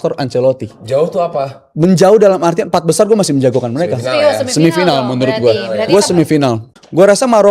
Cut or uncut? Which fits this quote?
uncut